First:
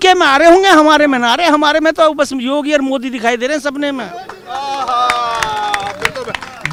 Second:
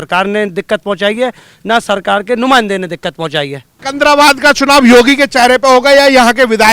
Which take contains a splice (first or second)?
second